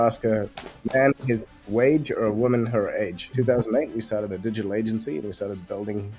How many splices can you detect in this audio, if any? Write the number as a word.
one